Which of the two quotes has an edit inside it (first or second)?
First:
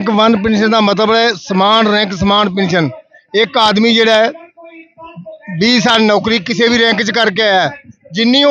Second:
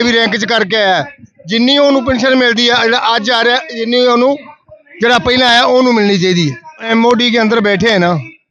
second